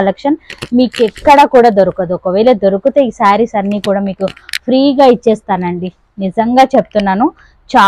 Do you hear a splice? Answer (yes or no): no